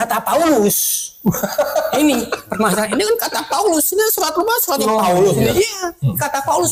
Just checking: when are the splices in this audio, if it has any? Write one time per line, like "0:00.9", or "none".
none